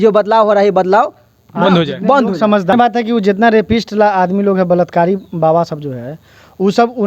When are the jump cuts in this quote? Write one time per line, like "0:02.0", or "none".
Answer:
0:02.7